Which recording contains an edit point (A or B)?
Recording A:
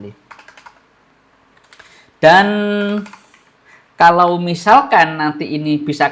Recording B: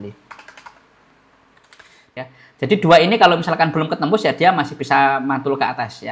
B